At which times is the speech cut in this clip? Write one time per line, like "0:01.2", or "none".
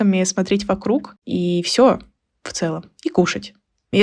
none